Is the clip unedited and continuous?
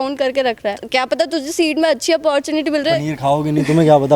no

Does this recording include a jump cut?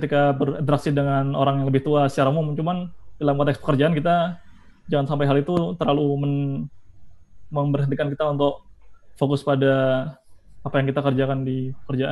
no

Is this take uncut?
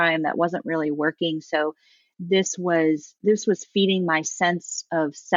yes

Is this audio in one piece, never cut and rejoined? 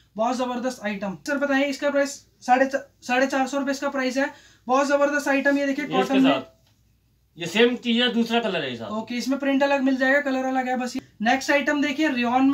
no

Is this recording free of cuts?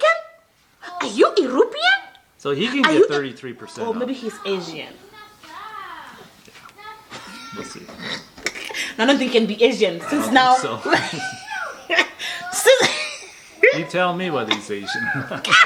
yes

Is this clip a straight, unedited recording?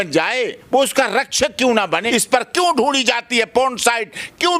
no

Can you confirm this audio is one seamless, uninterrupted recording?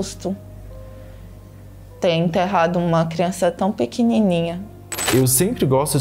no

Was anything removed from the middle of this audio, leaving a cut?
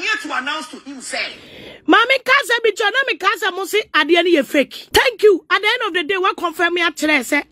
yes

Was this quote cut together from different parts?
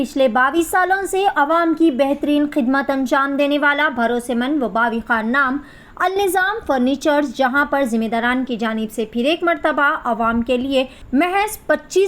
yes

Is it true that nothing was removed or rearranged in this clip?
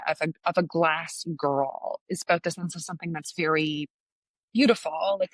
yes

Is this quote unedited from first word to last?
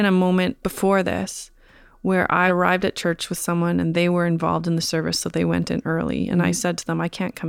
no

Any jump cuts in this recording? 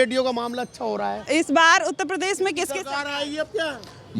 yes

